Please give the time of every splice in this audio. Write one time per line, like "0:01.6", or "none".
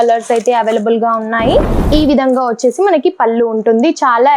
0:01.8